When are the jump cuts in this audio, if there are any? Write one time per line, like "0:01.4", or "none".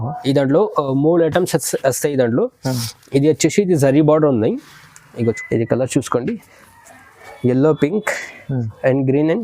0:05.4

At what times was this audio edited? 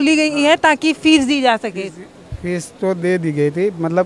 none

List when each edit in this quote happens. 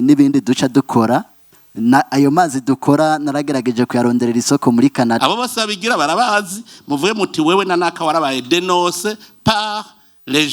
0:05.2

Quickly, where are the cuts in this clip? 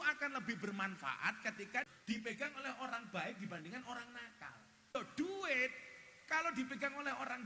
0:01.9
0:04.9

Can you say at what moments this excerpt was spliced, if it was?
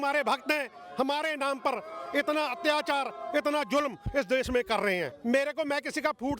0:05.1

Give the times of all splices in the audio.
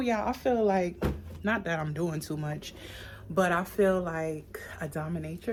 none

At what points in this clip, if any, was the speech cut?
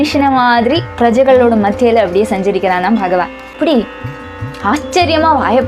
0:03.4

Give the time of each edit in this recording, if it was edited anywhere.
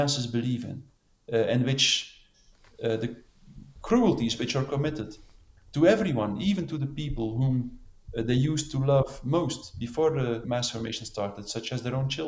0:10.4

